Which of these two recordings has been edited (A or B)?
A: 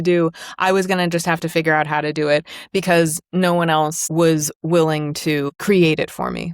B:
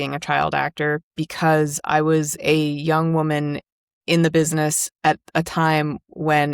A